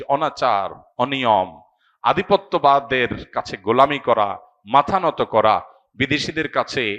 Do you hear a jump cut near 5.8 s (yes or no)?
no